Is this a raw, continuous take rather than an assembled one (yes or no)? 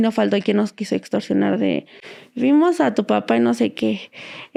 yes